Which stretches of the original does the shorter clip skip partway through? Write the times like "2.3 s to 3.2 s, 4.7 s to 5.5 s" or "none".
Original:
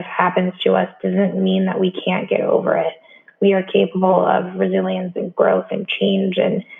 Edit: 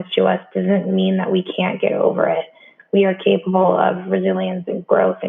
none